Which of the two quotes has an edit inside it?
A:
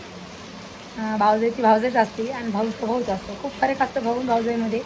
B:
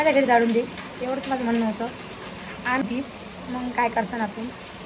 B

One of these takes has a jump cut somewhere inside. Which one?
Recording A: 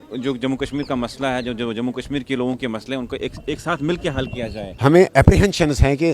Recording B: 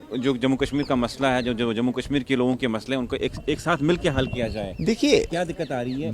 A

